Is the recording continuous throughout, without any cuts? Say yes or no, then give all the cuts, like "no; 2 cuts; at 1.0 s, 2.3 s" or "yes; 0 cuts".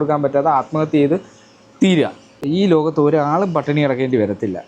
no; 1 cut; at 2.3 s